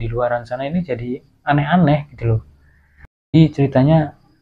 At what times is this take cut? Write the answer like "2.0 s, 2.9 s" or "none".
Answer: 3.3 s